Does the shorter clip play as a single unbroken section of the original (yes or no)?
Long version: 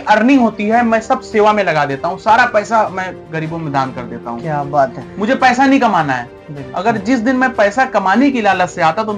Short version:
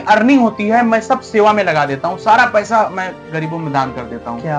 yes